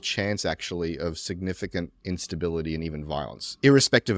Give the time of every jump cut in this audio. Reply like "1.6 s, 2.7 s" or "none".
none